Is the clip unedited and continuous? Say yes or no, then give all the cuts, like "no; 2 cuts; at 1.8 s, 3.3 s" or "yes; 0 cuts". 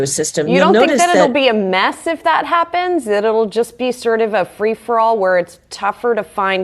yes; 0 cuts